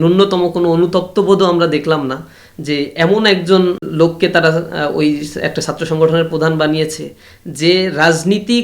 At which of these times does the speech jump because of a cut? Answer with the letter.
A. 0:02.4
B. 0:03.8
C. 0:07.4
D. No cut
B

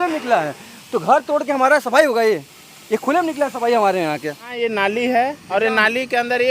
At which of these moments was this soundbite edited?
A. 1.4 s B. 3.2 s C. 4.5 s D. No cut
C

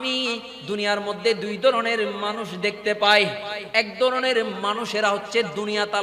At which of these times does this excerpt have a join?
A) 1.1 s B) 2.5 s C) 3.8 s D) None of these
D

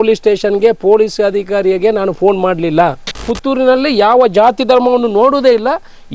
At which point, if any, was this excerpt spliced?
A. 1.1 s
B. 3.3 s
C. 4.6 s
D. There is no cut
B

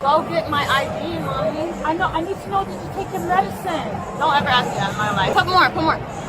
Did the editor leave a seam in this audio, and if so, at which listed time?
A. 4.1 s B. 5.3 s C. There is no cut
B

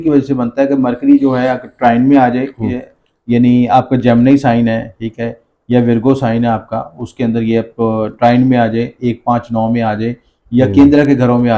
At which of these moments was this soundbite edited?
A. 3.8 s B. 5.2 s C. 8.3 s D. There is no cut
D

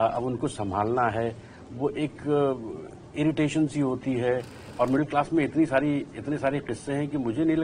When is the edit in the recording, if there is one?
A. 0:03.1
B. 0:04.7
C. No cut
B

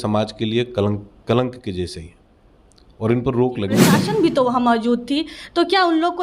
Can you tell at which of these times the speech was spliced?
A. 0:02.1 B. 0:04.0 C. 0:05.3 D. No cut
B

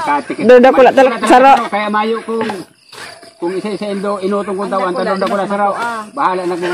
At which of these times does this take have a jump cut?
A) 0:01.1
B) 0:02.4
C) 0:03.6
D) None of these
A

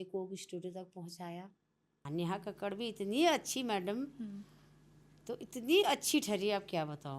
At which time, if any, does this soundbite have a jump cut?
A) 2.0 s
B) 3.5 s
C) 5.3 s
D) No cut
A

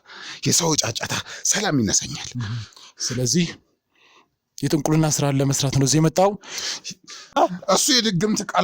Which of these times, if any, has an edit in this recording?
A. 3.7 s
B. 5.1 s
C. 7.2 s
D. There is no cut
C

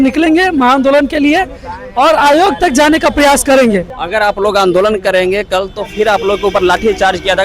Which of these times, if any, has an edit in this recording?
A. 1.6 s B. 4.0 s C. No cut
B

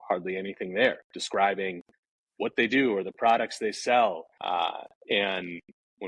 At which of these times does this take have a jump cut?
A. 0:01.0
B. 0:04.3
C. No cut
B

